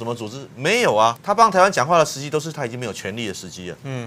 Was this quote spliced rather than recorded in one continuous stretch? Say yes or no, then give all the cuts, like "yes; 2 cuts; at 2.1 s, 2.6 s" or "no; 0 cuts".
yes; 1 cut; at 1.2 s